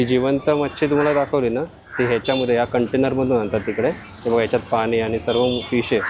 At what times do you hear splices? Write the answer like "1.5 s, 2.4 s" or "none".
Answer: none